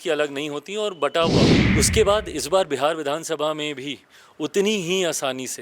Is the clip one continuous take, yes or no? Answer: no